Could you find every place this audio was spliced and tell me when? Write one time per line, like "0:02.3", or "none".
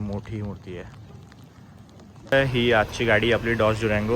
0:02.3